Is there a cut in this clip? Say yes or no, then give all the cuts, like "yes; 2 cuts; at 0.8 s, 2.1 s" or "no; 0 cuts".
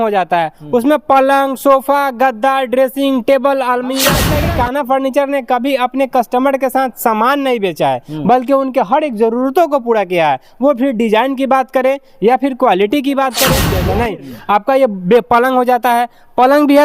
yes; 2 cuts; at 4.3 s, 13.7 s